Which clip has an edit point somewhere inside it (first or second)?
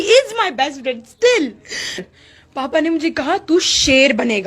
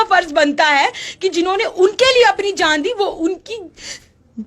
first